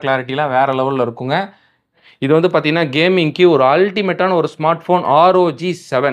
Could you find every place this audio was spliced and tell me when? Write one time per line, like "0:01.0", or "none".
0:02.1